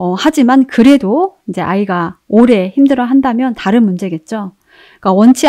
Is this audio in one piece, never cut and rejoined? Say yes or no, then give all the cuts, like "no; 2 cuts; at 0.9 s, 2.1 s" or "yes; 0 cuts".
yes; 0 cuts